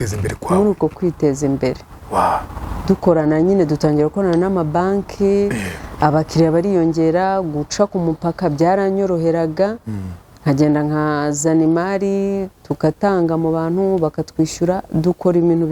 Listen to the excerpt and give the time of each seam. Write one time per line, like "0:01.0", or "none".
none